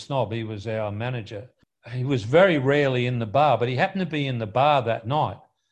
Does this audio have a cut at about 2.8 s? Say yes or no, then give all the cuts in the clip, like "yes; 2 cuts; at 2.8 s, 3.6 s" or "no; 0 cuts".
no; 1 cut; at 1.6 s